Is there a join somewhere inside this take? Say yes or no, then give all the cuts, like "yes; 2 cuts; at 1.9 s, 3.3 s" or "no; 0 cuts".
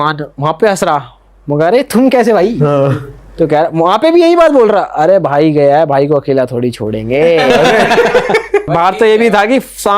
yes; 1 cut; at 8.7 s